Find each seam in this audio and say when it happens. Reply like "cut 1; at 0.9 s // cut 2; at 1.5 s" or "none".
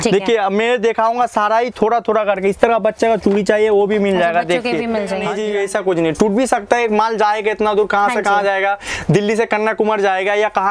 cut 1; at 5.2 s